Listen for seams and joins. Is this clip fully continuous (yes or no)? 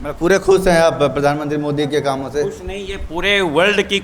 yes